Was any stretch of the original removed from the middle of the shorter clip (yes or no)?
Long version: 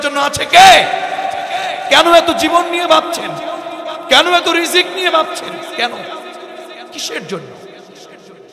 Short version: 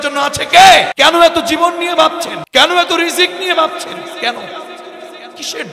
yes